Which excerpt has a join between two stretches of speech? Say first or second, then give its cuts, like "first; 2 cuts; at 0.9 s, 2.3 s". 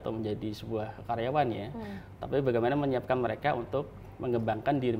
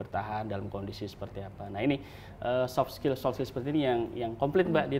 first; 1 cut; at 1.0 s